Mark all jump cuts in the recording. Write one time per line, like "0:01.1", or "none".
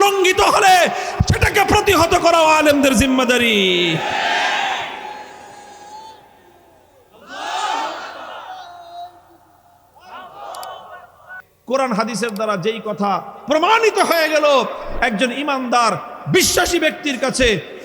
0:11.5